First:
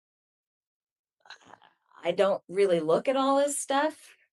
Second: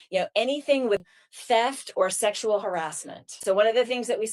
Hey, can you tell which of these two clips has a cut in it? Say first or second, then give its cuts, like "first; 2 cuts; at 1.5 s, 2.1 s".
second; 2 cuts; at 1.1 s, 3.4 s